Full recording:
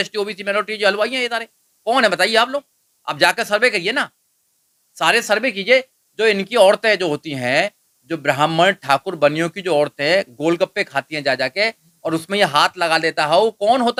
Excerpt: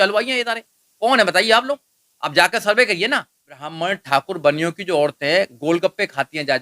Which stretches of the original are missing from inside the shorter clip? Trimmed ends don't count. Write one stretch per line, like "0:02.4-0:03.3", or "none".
0:04.6-0:08.5

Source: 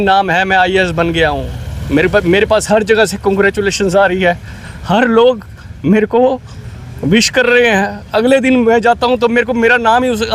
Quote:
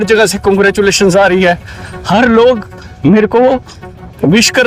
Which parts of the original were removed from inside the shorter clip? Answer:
none

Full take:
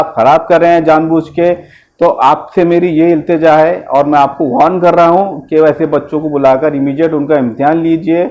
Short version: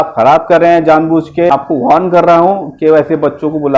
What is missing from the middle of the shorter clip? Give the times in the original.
0:01.5-0:04.2

